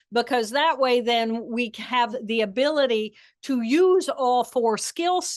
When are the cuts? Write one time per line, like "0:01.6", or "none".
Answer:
none

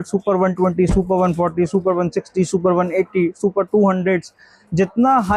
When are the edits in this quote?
none

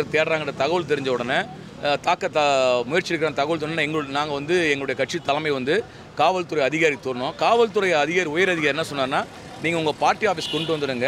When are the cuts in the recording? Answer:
none

